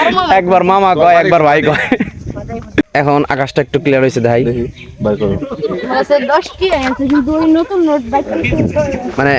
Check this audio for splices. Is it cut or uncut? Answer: uncut